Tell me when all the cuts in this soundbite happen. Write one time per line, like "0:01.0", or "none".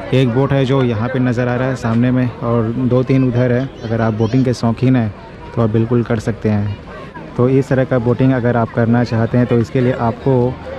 0:03.8
0:07.1